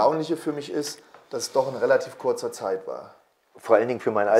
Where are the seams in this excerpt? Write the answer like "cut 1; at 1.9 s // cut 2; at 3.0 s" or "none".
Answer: none